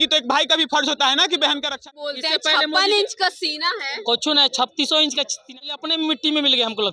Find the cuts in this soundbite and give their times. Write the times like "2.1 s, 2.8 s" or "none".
1.8 s, 5.7 s